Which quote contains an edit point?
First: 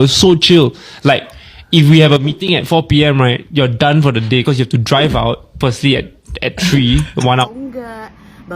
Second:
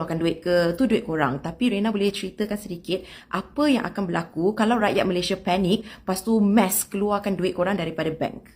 first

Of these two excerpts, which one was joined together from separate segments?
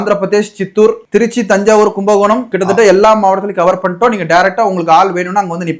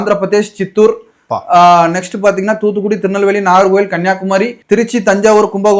first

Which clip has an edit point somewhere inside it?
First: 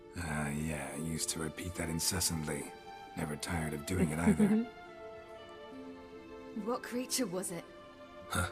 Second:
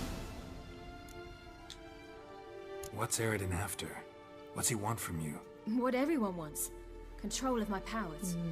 second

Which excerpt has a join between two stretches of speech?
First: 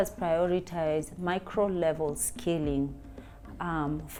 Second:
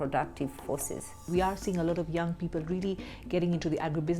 second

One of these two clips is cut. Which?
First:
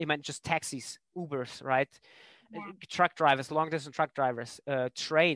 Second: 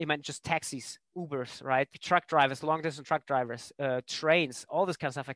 second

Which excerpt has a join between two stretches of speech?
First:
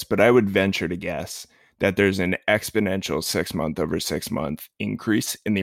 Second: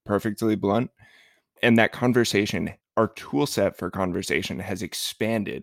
second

